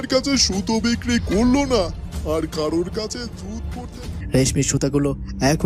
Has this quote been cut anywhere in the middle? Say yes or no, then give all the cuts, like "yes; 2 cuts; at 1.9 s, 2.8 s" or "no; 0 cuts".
yes; 1 cut; at 4.0 s